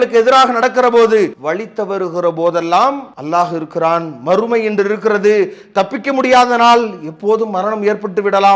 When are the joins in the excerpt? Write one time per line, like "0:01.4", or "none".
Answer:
0:01.4
0:03.1